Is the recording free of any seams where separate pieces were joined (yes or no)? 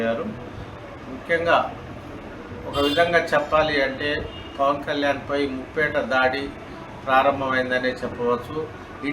yes